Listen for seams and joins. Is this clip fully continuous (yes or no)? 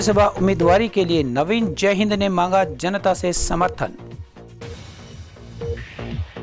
no